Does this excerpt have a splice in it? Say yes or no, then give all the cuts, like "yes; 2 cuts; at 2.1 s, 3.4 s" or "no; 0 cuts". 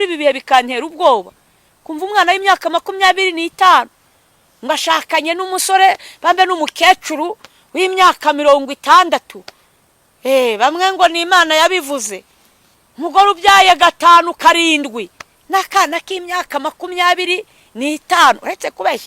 no; 0 cuts